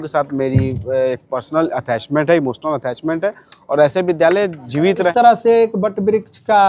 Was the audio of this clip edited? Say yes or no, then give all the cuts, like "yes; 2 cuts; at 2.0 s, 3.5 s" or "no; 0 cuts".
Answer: yes; 1 cut; at 5.1 s